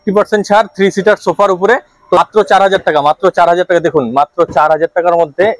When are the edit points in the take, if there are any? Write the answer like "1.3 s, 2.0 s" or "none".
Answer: 2.2 s